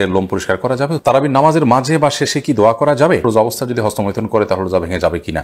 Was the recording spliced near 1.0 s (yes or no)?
yes